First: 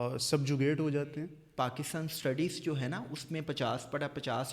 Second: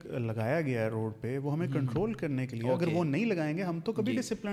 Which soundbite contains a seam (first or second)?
first